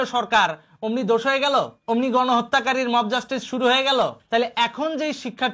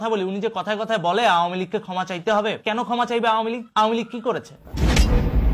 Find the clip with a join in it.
first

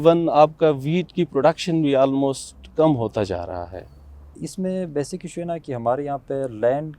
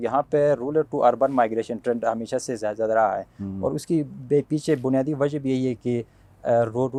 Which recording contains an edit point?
first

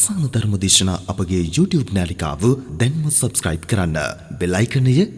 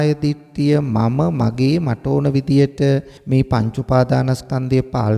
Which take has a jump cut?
second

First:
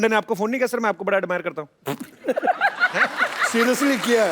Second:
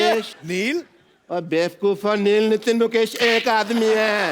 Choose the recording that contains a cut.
first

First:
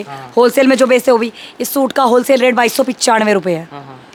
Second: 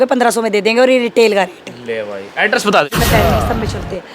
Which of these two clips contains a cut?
second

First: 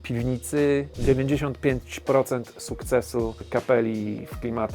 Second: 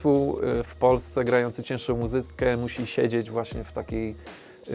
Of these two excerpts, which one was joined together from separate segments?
first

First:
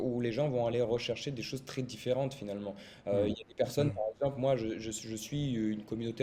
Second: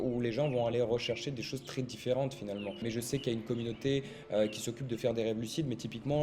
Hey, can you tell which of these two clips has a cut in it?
second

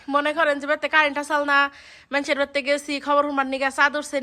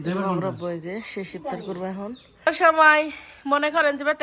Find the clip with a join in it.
second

